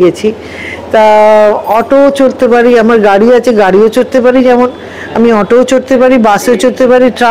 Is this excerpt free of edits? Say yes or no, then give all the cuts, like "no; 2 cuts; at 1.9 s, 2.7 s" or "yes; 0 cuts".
yes; 0 cuts